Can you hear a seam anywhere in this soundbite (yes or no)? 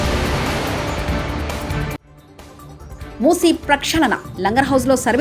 yes